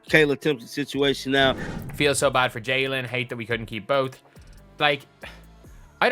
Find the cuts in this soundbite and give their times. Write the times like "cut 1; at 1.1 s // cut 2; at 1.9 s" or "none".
cut 1; at 1.7 s